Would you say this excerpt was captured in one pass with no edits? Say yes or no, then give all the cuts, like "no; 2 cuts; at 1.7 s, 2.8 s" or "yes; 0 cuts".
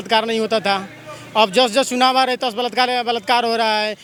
yes; 0 cuts